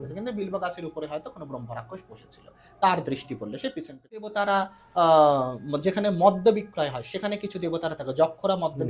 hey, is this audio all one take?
no; 1 cut; at 4.2 s

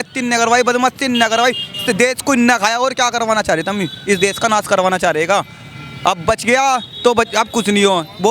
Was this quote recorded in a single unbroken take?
yes; 0 cuts

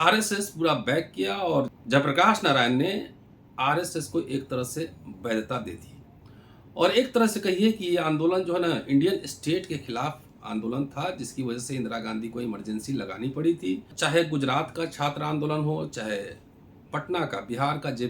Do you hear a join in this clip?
yes; 1 cut; at 13.9 s

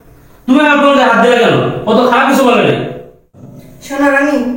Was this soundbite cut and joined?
yes; 1 cut; at 3.5 s

